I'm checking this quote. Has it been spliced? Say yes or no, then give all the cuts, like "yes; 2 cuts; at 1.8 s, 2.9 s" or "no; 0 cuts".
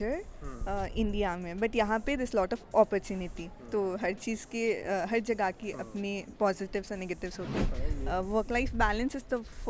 yes; 1 cut; at 7.7 s